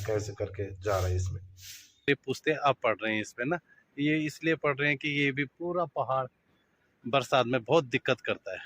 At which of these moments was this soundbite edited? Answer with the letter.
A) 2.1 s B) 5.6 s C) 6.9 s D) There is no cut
A